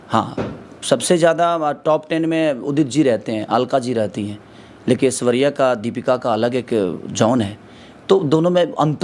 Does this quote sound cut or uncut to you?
uncut